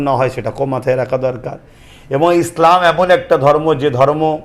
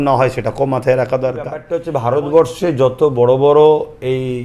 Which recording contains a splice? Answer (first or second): second